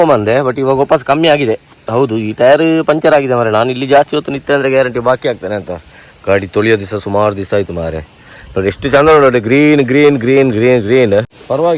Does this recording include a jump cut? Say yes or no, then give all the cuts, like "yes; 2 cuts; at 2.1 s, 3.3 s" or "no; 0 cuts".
no; 0 cuts